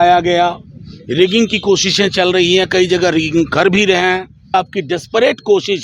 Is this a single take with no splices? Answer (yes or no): no